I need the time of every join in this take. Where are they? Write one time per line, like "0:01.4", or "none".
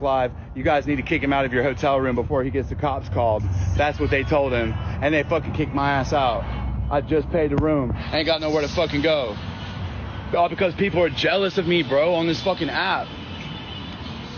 none